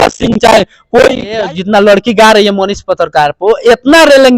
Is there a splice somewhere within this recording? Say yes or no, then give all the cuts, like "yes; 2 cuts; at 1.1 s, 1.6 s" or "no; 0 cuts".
yes; 1 cut; at 1.5 s